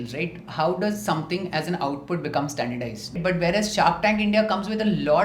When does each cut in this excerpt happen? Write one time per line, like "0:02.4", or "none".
0:03.2